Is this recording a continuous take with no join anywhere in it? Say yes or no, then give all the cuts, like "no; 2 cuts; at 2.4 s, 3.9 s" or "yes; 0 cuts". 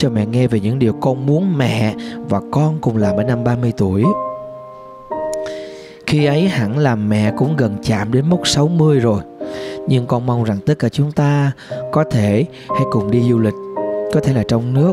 yes; 0 cuts